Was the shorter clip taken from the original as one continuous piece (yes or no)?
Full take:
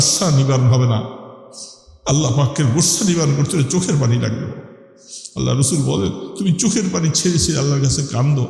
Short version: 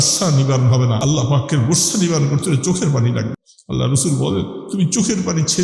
no